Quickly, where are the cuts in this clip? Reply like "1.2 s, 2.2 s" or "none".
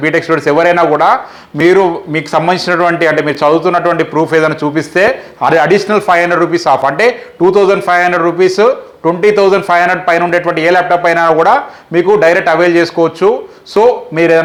none